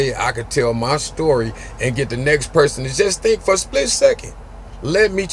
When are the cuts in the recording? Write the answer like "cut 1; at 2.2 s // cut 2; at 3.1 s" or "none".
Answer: none